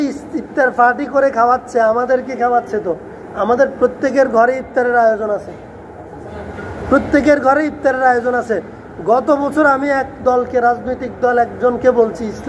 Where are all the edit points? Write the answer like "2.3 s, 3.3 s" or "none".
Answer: none

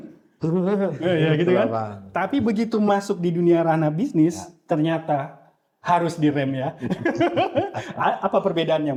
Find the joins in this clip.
none

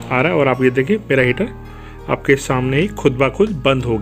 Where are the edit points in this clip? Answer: none

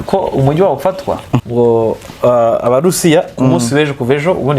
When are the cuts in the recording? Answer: 1.5 s

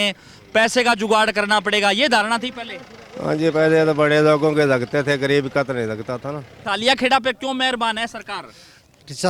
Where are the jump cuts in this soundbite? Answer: 6.5 s

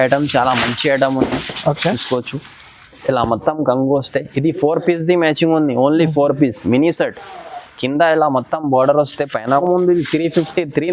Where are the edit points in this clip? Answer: 9.6 s

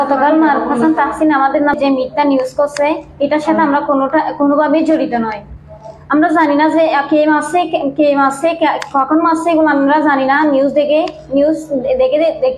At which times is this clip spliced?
1.7 s

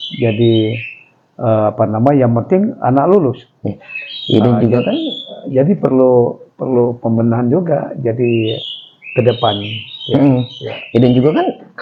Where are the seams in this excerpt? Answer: none

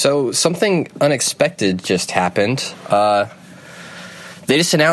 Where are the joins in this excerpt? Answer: none

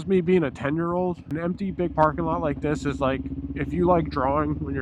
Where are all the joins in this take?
1.3 s

